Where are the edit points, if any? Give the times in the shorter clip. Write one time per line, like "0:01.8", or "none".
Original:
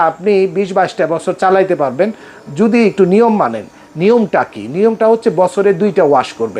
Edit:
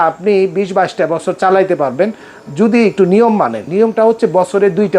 0:03.6